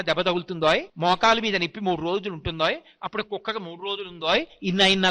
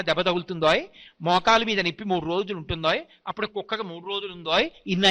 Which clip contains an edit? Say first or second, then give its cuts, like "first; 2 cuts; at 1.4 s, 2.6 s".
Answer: first; 1 cut; at 0.9 s